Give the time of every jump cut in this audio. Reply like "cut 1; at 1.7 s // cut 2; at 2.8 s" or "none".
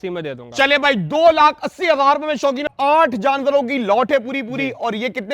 cut 1; at 2.7 s